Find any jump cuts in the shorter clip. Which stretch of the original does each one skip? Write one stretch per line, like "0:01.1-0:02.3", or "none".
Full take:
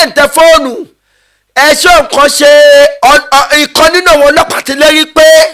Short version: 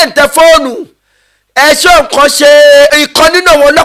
0:02.9-0:03.5